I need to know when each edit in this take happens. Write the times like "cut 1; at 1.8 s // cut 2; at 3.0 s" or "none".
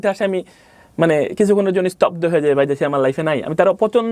none